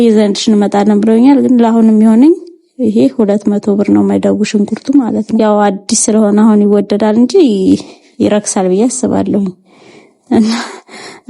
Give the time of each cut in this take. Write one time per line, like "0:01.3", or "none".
0:05.3